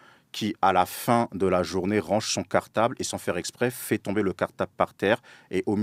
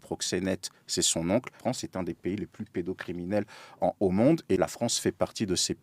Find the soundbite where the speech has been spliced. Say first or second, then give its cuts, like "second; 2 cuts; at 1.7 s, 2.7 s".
second; 2 cuts; at 1.5 s, 4.6 s